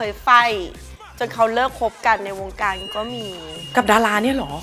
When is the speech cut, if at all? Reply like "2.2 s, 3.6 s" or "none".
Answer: none